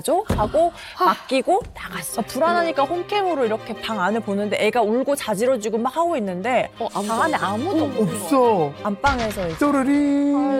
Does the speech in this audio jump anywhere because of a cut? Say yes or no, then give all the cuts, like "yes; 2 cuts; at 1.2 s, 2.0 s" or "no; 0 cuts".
yes; 2 cuts; at 2.1 s, 8.8 s